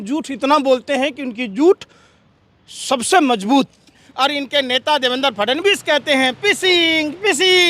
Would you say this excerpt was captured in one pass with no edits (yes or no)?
no